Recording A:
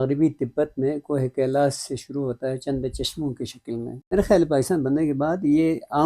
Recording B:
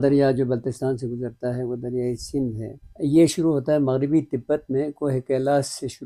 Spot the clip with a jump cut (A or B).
A